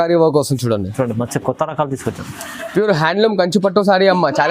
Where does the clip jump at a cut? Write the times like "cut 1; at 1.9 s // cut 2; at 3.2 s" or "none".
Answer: none